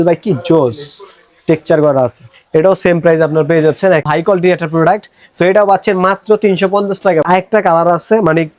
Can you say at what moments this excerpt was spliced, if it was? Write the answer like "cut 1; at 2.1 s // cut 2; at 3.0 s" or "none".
cut 1; at 4.0 s // cut 2; at 7.2 s